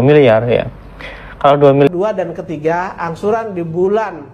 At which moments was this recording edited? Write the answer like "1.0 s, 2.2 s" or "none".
1.9 s